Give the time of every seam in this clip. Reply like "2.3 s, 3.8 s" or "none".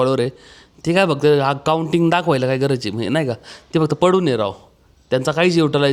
none